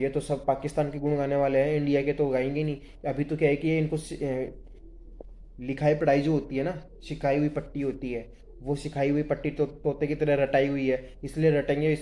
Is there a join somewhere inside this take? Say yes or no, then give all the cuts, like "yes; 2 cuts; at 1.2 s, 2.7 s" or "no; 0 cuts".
no; 0 cuts